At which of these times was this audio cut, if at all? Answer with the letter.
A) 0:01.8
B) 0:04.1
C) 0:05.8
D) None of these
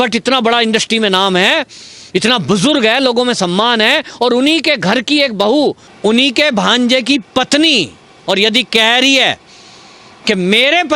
C